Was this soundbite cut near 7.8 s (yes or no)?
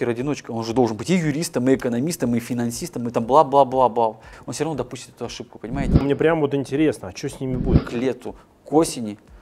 yes